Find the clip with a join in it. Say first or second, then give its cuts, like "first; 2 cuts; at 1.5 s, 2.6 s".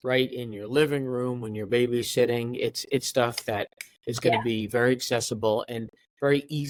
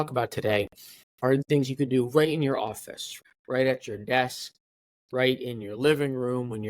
second; 2 cuts; at 1.5 s, 3.2 s